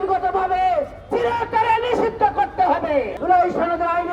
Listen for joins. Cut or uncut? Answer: cut